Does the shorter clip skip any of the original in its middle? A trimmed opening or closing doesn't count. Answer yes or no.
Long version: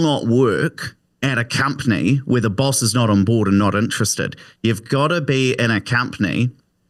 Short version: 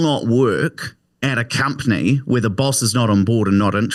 no